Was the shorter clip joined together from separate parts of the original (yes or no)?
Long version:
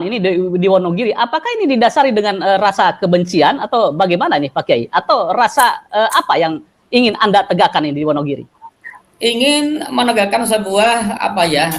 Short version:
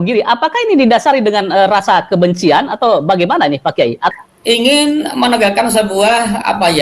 yes